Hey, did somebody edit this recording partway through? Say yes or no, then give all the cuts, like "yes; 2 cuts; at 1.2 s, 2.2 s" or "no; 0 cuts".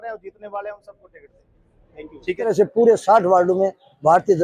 yes; 1 cut; at 2.5 s